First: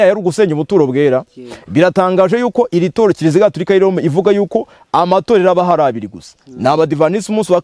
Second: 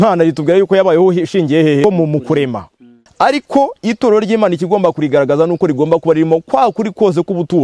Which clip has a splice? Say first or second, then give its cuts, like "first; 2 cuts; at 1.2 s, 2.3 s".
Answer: second; 2 cuts; at 1.8 s, 3.0 s